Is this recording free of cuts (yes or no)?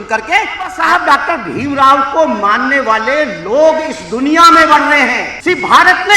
no